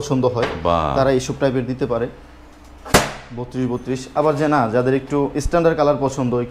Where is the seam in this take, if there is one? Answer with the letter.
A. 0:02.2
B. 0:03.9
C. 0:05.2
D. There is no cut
D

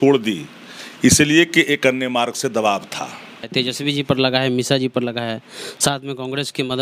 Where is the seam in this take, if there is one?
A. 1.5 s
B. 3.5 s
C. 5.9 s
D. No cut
B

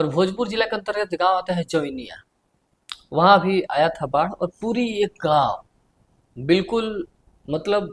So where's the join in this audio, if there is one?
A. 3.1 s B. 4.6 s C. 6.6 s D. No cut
D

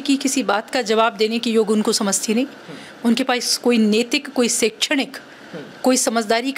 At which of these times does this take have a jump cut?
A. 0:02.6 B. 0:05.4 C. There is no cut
C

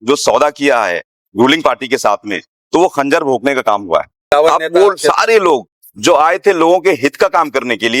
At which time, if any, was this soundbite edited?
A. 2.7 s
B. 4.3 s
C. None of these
B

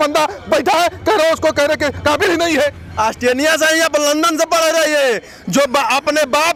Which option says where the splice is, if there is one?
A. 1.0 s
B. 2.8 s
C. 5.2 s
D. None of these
D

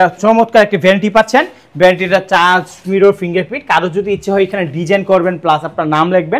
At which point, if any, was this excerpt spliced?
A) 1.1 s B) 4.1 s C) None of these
C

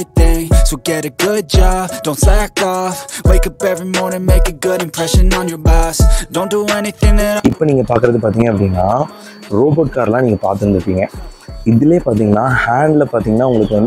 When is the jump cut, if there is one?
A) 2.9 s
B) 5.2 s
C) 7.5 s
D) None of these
C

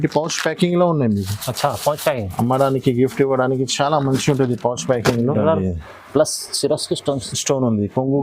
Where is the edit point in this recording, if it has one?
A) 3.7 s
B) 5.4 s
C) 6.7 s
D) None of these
B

